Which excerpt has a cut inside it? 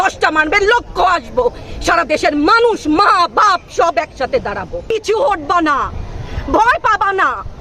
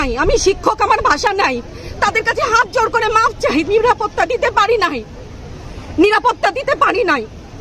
first; 1 cut; at 4.9 s

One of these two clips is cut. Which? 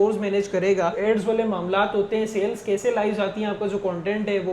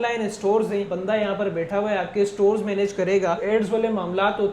second; 1 cut; at 0.9 s

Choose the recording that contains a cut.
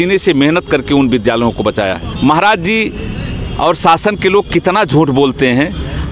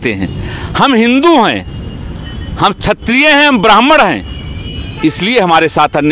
first; 1 cut; at 2.1 s

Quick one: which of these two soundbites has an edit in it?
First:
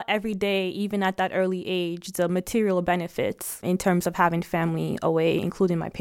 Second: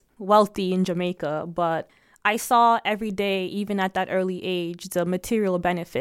second; 1 cut; at 1.9 s

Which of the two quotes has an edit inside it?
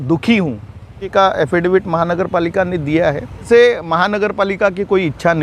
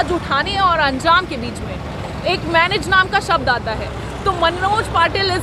first; 2 cuts; at 1.0 s, 3.5 s

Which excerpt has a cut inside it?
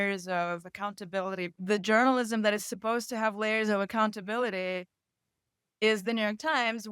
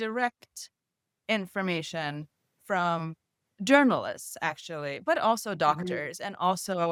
first; 1 cut; at 1.4 s

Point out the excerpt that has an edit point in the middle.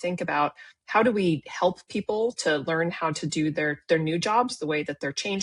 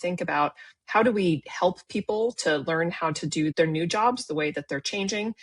second; 1 cut; at 3.5 s

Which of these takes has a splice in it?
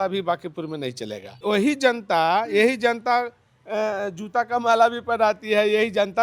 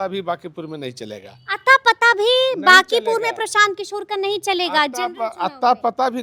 first; 1 cut; at 1.4 s

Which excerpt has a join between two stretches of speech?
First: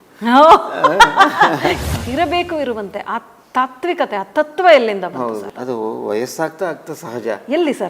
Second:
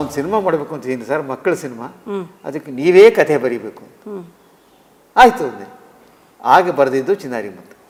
first; 2 cuts; at 1.8 s, 5.5 s

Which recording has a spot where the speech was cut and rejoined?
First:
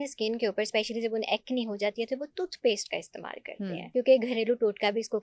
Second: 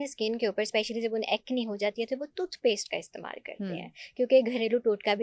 first; 1 cut; at 3.8 s

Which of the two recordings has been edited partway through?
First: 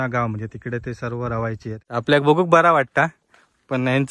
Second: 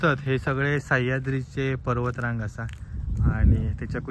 first; 1 cut; at 1.8 s

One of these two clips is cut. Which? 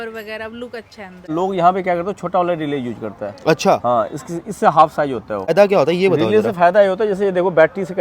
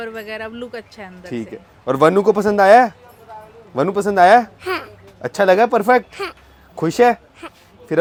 first; 2 cuts; at 1.3 s, 5.5 s

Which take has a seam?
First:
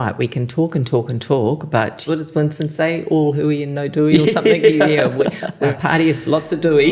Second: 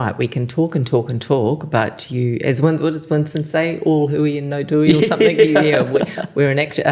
first; 2 cuts; at 2.0 s, 5.7 s

